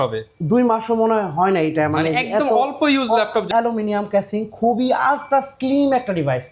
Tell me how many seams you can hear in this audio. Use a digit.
1